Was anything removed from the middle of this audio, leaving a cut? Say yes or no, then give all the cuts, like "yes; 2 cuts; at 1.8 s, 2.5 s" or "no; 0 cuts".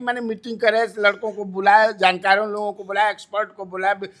no; 0 cuts